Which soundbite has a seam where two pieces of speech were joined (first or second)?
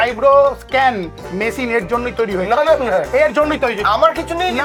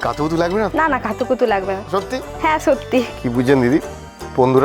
second